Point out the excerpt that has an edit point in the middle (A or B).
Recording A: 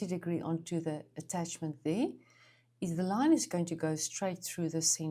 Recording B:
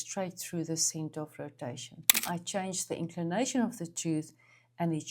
B